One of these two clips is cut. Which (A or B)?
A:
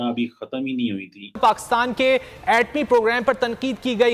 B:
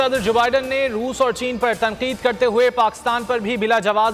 A